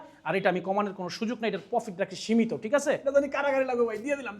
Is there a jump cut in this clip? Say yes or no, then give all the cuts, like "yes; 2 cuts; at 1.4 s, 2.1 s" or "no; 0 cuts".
yes; 1 cut; at 2.7 s